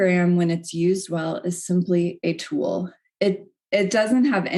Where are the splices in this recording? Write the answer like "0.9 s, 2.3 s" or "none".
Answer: none